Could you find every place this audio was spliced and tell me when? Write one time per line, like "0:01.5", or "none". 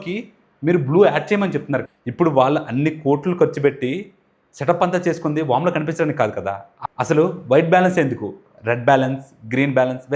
0:01.9
0:06.7